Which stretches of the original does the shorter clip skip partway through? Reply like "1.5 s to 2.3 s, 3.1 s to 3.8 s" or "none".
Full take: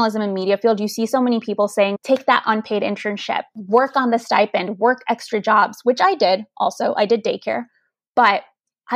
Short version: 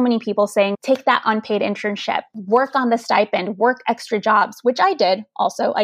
none